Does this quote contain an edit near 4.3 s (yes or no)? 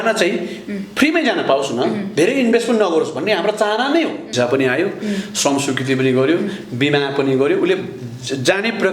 yes